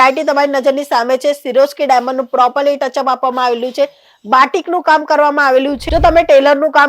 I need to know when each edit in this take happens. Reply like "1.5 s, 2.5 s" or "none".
5.8 s